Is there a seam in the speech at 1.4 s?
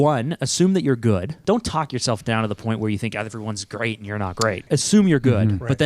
yes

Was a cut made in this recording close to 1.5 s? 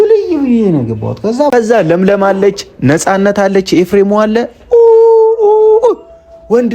yes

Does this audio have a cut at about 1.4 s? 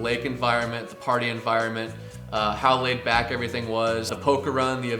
no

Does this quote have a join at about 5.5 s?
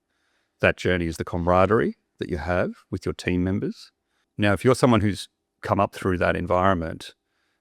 no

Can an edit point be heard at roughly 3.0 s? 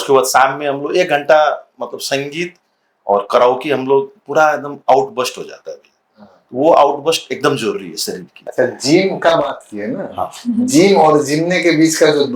no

